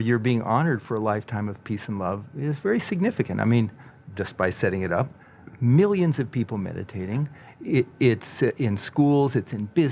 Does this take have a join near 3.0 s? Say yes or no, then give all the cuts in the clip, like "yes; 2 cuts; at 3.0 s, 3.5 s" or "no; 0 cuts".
no; 0 cuts